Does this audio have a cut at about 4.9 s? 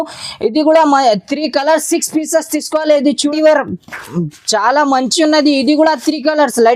no; 1 cut; at 3.3 s

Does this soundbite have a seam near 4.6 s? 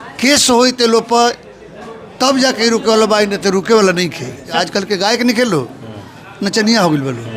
yes; 1 cut; at 4.6 s

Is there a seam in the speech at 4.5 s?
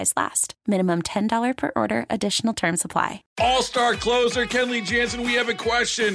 no; 1 cut; at 3.2 s

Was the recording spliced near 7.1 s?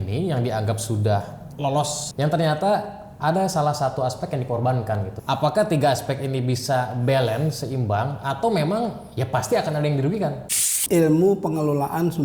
no; 3 cuts; at 2.0 s, 5.1 s, 10.8 s

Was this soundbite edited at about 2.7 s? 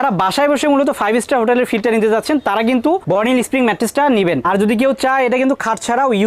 no; 1 cut; at 4.4 s

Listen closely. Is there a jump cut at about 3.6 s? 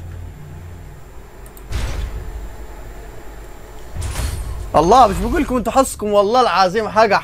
no; 1 cut; at 1.7 s

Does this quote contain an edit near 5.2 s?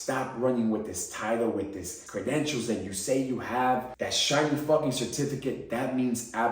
no; 2 cuts; at 2.0 s, 3.9 s

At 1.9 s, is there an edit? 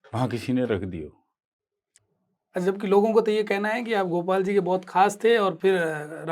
yes; 1 cut; at 1.9 s

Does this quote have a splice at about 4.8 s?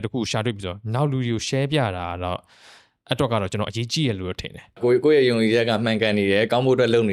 yes; 1 cut; at 4.8 s

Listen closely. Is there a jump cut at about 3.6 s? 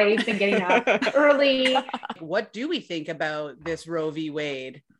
no; 1 cut; at 2.1 s

